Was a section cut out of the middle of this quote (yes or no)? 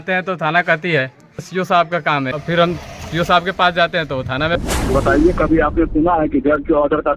yes